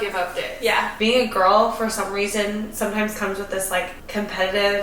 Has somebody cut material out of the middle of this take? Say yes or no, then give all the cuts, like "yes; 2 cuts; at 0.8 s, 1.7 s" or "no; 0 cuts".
yes; 2 cuts; at 0.9 s, 4.0 s